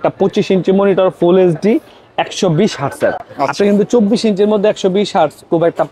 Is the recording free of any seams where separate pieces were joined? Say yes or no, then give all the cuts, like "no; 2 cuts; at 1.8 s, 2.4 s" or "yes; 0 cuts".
yes; 0 cuts